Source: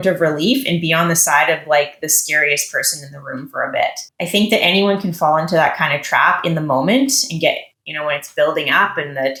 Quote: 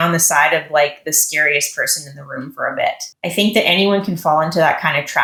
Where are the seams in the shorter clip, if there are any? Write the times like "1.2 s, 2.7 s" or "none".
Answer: none